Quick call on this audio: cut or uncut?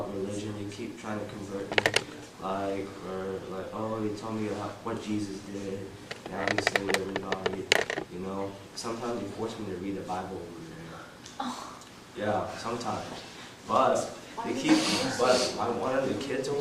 cut